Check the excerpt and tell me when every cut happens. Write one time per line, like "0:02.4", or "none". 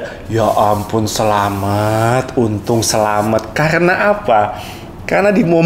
none

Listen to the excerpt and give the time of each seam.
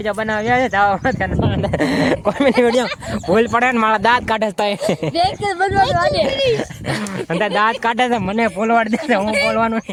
none

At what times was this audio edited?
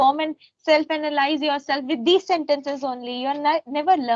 none

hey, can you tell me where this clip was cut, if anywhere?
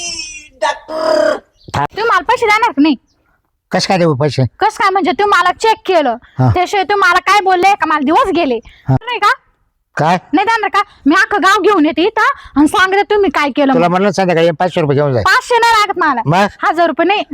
0:01.8
0:09.0

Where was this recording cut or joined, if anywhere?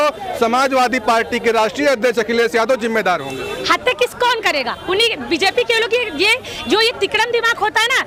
none

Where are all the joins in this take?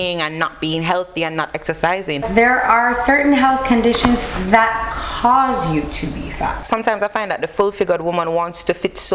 0:02.2
0:06.6

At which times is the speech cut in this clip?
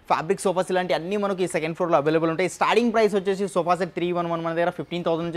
none

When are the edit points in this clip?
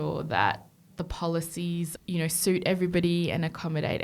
0:02.0

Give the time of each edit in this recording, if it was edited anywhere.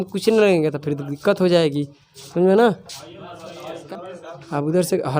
0:03.7

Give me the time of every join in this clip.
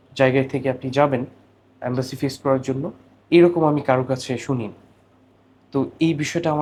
none

